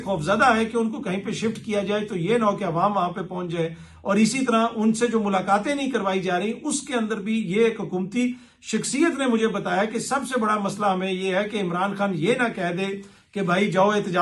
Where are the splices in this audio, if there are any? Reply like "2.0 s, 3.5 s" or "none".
none